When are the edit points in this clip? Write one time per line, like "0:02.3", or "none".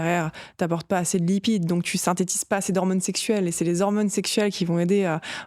none